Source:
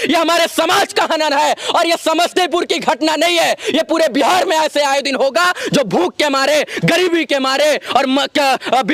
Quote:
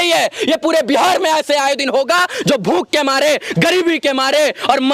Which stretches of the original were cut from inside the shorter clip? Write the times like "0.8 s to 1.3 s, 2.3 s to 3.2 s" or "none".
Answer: none